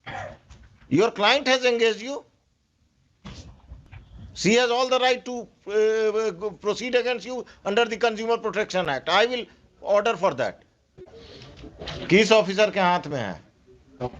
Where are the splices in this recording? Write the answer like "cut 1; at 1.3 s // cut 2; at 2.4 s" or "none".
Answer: cut 1; at 11.0 s